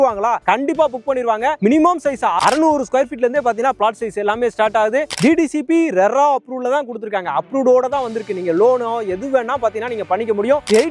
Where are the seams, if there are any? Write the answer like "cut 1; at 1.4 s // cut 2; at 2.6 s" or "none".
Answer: cut 1; at 1.6 s